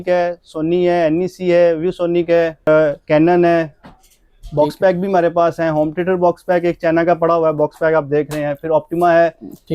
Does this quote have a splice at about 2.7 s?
yes; 1 cut; at 2.7 s

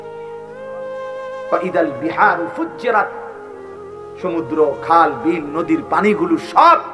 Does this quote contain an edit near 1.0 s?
yes; 1 cut; at 1.0 s

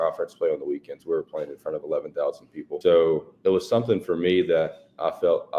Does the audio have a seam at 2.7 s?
yes; 1 cut; at 2.7 s

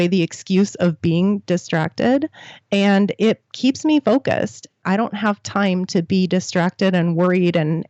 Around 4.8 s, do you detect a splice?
yes; 1 cut; at 4.8 s

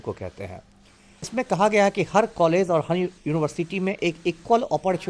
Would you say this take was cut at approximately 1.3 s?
yes; 1 cut; at 1.3 s

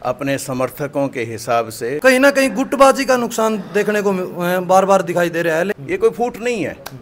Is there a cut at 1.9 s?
yes; 2 cuts; at 1.9 s, 5.8 s

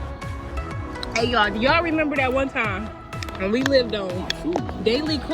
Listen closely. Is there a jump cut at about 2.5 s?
no; 1 cut; at 1.1 s

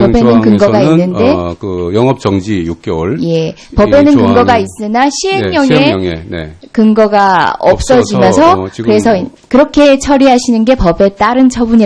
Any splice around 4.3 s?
yes; 1 cut; at 4.3 s

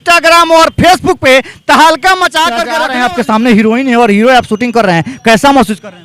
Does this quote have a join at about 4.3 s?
no; 1 cut; at 2.7 s

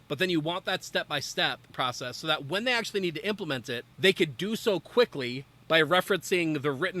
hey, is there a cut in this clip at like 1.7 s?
yes; 2 cuts; at 1.7 s, 3.8 s

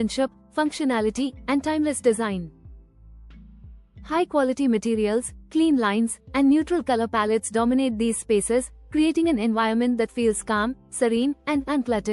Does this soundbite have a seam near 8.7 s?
no; 2 cuts; at 2.6 s, 3.8 s

